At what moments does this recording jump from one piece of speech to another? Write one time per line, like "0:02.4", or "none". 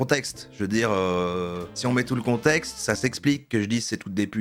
none